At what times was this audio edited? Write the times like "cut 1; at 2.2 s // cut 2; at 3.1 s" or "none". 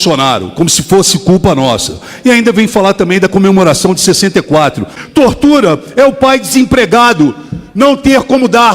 cut 1; at 4.9 s